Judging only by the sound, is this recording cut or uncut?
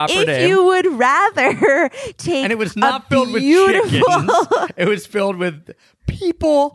uncut